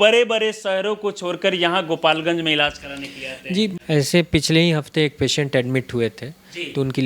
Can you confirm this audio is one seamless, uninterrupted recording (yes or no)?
no